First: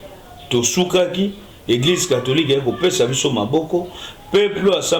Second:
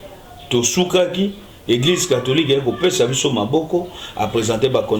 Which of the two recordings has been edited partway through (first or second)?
second